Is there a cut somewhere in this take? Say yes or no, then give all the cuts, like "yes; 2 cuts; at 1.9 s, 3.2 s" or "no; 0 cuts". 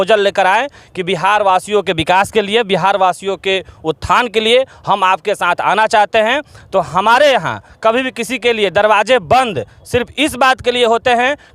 no; 0 cuts